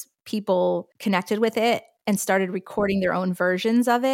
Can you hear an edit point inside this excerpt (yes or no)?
yes